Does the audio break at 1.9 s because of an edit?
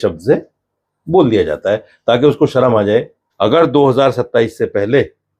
no; 1 cut; at 3.2 s

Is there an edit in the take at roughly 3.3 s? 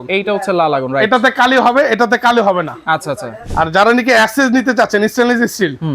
yes; 1 cut; at 3.3 s

